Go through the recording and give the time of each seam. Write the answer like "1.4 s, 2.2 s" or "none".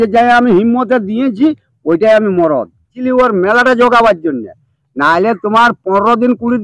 3.0 s